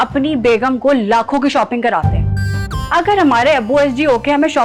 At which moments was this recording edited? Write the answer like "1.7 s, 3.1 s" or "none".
none

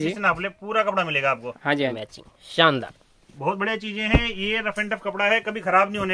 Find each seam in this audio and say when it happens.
2.0 s

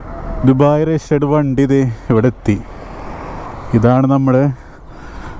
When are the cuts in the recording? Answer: none

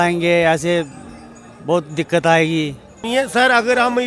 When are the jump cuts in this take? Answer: 3.0 s

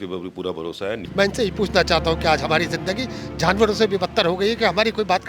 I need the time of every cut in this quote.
1.0 s

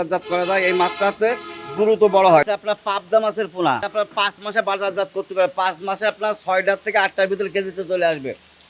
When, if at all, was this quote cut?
2.4 s, 3.9 s

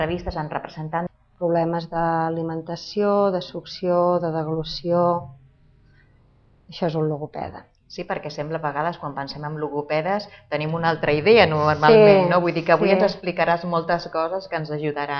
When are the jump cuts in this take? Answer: none

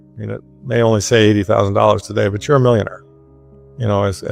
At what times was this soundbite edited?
none

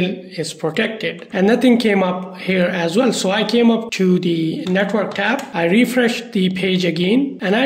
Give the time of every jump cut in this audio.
1.2 s

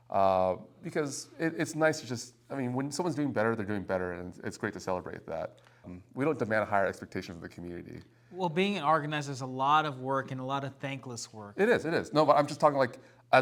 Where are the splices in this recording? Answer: none

